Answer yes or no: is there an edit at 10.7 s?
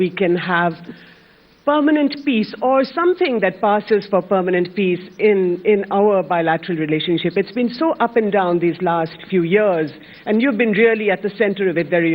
no